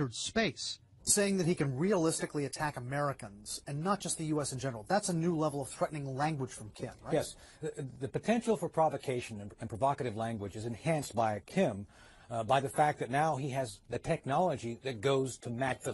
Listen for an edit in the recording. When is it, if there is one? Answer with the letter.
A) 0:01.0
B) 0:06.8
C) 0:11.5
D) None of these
A